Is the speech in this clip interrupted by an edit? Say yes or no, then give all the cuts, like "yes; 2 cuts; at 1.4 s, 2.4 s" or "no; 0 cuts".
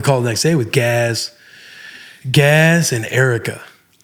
no; 0 cuts